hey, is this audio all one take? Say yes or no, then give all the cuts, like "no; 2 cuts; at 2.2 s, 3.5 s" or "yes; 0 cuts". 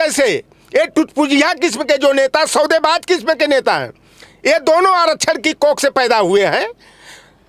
yes; 0 cuts